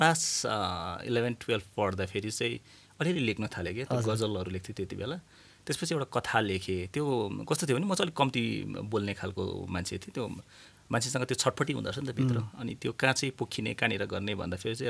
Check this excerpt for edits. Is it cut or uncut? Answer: uncut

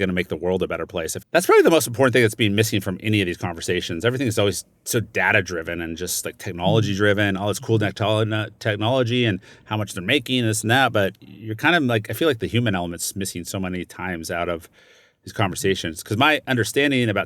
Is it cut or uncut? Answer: cut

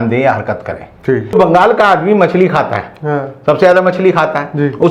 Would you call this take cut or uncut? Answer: cut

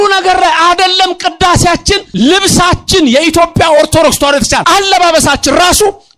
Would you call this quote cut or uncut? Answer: cut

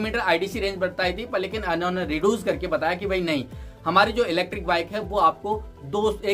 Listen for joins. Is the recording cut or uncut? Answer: uncut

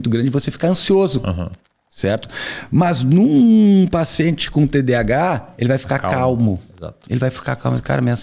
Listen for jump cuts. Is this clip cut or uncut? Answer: uncut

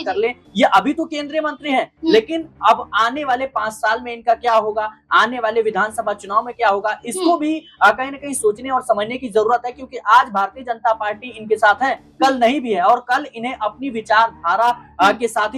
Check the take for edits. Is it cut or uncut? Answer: uncut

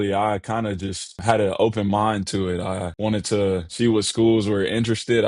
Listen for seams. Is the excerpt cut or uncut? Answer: cut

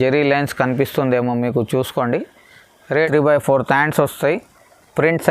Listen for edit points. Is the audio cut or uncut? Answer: cut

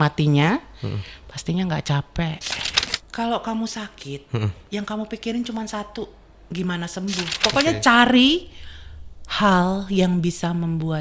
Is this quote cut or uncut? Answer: cut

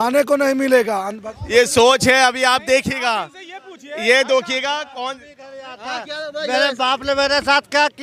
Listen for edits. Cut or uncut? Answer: uncut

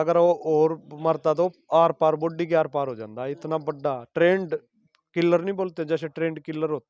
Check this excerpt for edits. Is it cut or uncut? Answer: uncut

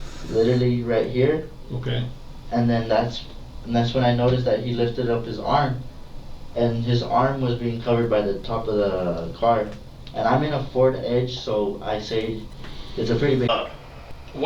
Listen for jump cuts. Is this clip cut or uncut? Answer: cut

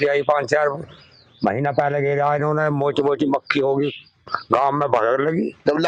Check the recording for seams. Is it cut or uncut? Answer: uncut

